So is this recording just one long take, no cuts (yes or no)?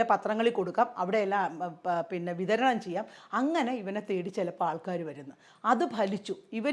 yes